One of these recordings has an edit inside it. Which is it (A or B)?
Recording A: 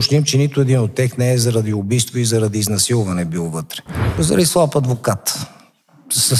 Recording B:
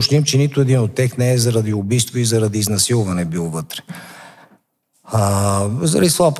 A